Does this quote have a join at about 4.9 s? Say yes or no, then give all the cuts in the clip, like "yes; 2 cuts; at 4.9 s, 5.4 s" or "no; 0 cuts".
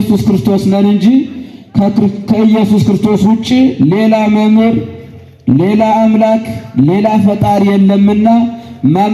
no; 0 cuts